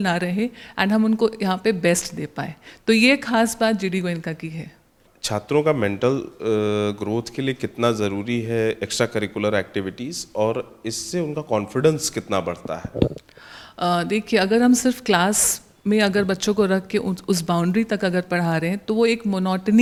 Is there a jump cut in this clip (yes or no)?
no